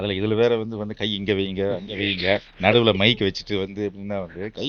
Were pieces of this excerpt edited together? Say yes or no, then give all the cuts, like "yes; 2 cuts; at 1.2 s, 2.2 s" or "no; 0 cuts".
no; 0 cuts